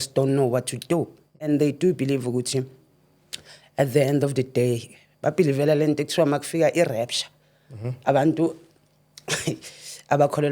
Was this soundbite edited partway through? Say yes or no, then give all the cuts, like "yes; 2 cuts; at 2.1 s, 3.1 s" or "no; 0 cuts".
yes; 1 cut; at 1.4 s